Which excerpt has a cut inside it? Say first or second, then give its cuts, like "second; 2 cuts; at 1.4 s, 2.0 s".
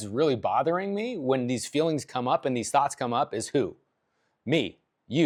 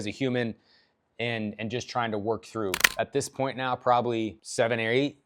second; 2 cuts; at 2.8 s, 4.4 s